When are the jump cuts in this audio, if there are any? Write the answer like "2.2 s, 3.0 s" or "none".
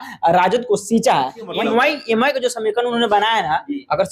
1.5 s